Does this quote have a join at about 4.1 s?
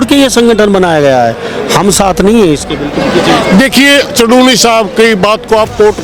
no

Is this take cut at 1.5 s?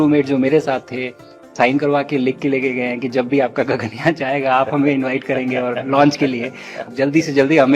yes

